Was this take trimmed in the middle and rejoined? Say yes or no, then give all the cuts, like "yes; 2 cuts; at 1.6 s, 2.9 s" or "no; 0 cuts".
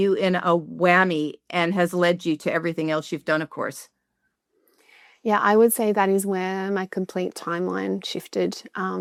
no; 0 cuts